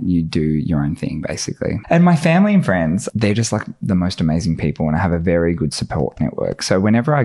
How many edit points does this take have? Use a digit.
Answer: 2